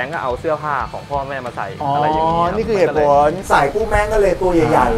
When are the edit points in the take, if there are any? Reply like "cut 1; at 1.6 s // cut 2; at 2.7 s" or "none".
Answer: cut 1; at 3.4 s